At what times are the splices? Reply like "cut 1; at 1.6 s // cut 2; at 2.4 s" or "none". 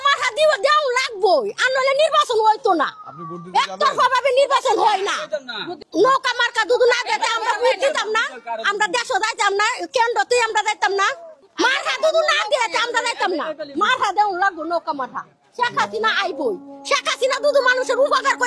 none